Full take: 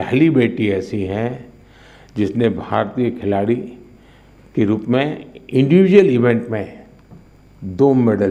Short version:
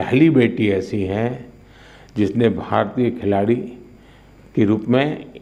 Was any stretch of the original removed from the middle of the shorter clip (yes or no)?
no